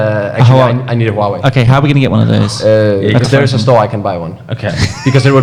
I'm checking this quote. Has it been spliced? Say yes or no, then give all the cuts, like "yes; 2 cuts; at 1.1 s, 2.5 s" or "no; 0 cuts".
no; 0 cuts